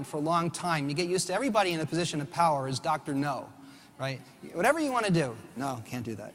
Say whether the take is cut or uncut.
cut